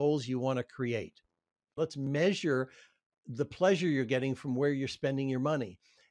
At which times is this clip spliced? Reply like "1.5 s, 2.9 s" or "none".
2.0 s